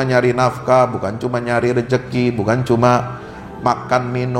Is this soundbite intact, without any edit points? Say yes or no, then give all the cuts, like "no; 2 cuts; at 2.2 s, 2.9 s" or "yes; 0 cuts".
yes; 0 cuts